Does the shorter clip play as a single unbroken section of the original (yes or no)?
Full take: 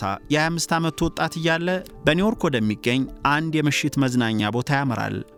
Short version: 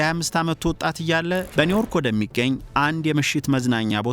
no